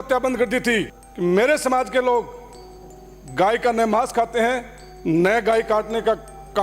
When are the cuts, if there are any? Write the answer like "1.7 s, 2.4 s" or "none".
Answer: 0.9 s